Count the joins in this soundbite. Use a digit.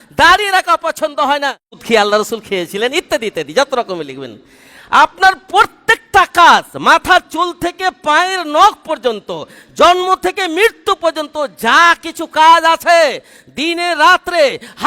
1